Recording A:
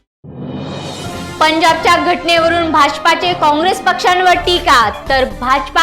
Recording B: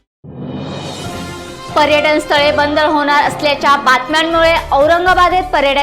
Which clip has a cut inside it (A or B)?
B